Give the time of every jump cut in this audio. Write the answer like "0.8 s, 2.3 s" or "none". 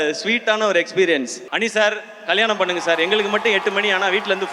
1.4 s